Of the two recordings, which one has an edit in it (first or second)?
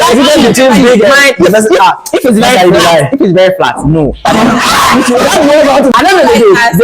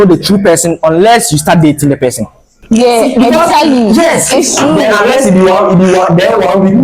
first